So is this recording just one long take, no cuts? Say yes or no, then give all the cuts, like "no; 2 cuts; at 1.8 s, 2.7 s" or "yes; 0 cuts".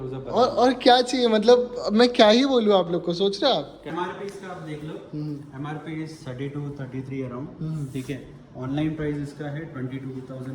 no; 1 cut; at 3.9 s